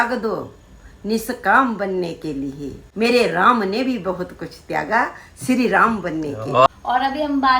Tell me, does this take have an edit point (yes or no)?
yes